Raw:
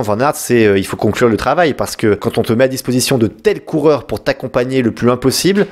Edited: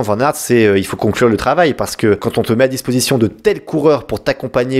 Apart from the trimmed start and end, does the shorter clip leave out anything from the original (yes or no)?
no